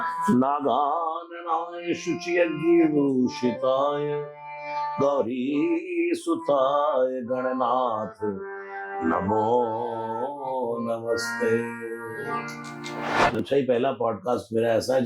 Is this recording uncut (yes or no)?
no